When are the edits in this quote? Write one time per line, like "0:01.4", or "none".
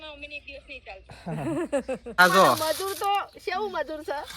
0:02.2